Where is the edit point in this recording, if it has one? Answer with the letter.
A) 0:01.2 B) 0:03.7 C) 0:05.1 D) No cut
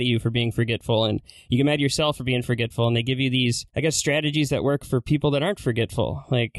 B